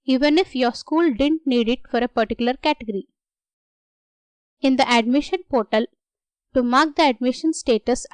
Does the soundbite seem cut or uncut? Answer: uncut